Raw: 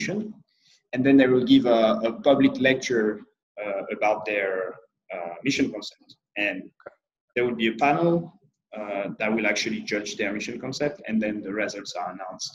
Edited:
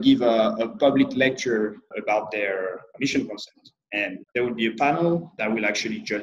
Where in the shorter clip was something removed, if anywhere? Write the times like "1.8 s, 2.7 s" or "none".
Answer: 1.9 s, 2.9 s, 4.2 s, 5.3 s